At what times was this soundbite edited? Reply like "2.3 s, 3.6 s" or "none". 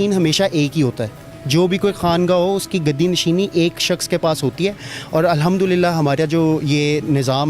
none